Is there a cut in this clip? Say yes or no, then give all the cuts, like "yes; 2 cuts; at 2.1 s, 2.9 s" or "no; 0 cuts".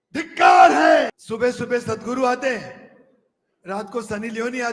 yes; 1 cut; at 1.2 s